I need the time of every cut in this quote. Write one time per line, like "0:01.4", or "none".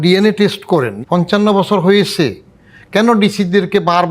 0:00.9